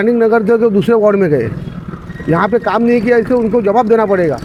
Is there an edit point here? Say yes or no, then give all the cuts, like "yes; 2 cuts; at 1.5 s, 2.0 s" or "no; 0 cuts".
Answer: no; 0 cuts